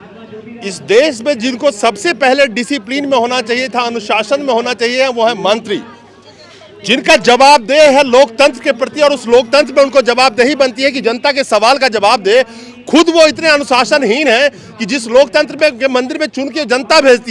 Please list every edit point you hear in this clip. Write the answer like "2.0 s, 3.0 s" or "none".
none